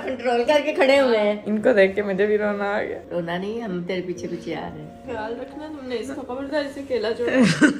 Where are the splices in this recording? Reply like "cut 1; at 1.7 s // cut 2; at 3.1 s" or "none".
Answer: cut 1; at 1.4 s // cut 2; at 5.0 s

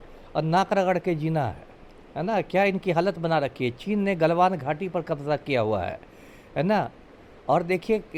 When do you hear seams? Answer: none

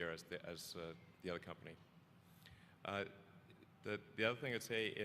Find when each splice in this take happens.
cut 1; at 3.2 s

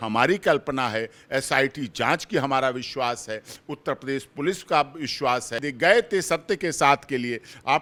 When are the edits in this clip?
none

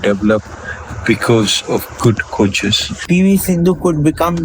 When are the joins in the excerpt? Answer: cut 1; at 2.9 s

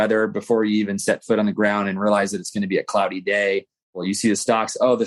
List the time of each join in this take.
cut 1; at 4.0 s

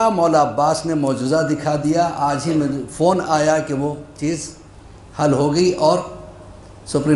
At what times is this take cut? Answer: none

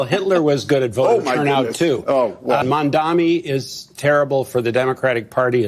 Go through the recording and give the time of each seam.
cut 1; at 2.6 s

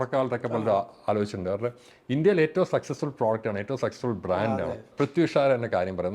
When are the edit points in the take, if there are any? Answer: cut 1; at 4.9 s

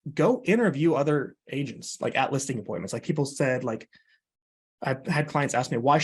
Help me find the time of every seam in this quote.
none

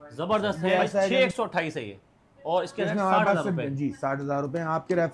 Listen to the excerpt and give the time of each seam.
cut 1; at 1.1 s

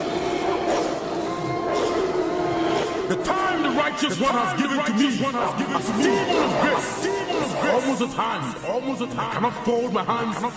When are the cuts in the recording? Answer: cut 1; at 6.2 s

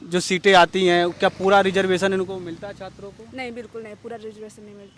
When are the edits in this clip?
none

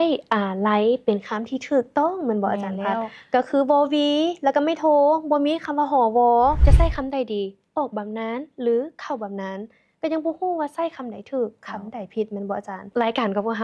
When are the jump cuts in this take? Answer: cut 1; at 6.6 s

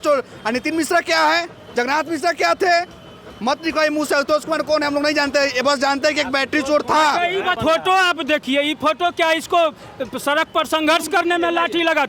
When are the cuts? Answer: cut 1; at 7.6 s

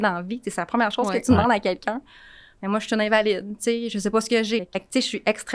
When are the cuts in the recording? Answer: cut 1; at 4.7 s

